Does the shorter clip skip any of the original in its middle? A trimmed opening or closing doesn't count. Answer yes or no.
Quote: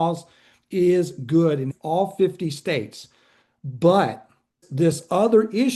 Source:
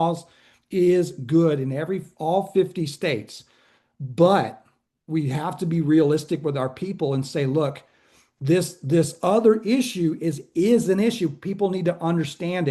yes